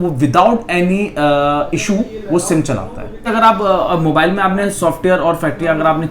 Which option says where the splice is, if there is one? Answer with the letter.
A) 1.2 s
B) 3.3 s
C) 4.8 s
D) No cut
B